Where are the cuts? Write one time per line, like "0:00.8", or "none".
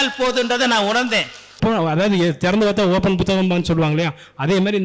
0:01.6